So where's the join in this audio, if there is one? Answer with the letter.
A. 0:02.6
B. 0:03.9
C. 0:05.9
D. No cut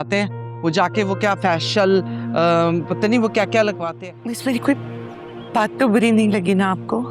B